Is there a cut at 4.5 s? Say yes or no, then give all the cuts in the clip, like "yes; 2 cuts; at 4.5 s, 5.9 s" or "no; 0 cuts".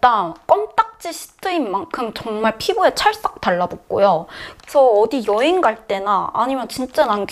yes; 1 cut; at 4.5 s